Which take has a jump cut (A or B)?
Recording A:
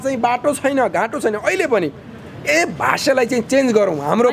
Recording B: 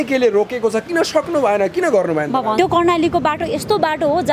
B